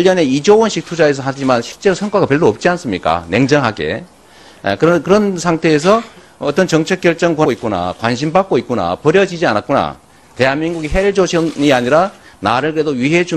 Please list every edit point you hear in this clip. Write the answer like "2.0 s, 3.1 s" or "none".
none